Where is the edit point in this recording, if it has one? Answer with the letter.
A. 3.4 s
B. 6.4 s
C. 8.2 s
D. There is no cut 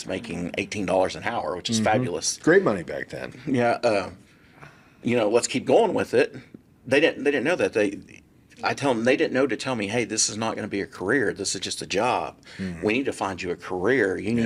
D